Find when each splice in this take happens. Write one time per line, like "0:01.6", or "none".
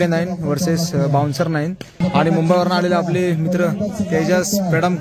0:02.0